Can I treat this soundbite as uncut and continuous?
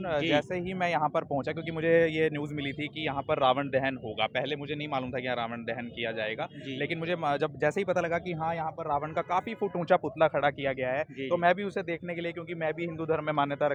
yes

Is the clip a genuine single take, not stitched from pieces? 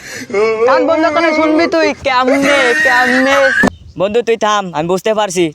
no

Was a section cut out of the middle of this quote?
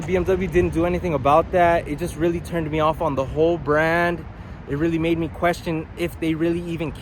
no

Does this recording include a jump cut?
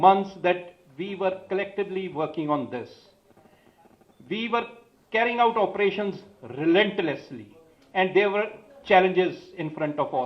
no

